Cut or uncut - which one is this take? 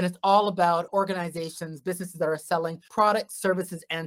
cut